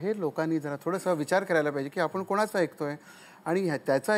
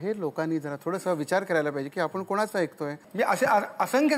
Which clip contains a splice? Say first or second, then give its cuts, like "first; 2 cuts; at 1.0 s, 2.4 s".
second; 1 cut; at 3.0 s